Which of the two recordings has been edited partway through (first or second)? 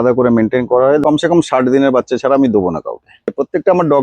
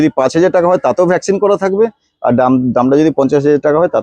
first